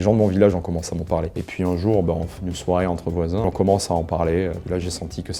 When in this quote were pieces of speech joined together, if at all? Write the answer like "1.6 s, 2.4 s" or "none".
1.4 s, 2.3 s, 3.4 s, 4.6 s